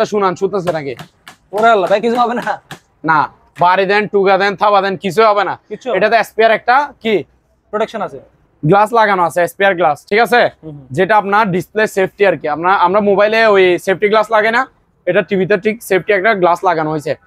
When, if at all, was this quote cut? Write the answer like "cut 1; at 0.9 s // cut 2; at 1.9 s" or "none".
none